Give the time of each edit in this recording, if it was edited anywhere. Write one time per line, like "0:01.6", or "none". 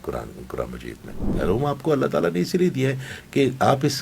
0:01.2